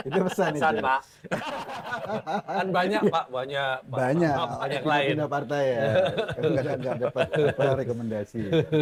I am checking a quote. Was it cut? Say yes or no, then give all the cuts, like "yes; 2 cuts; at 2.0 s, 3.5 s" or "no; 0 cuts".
no; 0 cuts